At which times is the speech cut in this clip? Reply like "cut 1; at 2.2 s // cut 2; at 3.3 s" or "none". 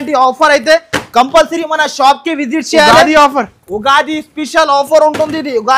none